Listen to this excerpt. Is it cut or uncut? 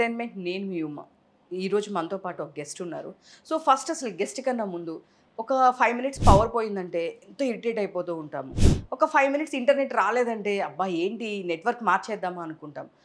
uncut